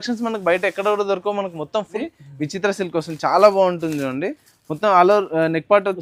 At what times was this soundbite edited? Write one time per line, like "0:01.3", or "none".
0:02.0